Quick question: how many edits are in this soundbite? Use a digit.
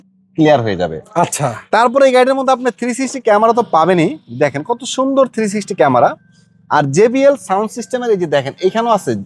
0